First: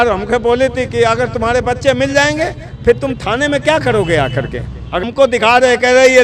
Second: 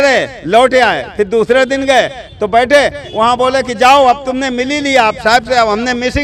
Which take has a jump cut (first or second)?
first